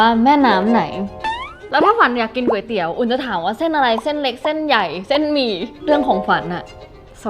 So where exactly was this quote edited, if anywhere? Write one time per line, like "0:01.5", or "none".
0:01.5
0:05.7